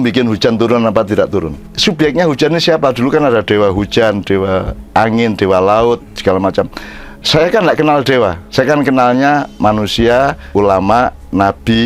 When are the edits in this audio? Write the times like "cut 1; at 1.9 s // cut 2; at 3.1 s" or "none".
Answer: cut 1; at 1.7 s // cut 2; at 8.4 s // cut 3; at 10.4 s